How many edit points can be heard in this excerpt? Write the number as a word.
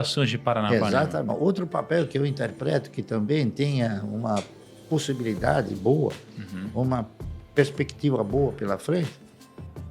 one